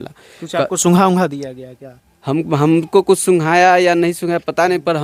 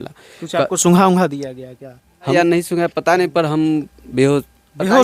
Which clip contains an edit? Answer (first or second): second